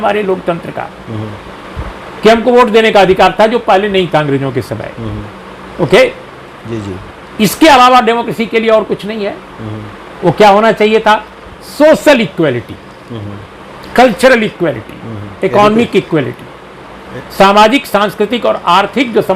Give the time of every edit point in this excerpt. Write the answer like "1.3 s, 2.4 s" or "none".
none